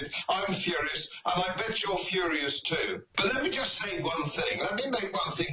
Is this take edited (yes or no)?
yes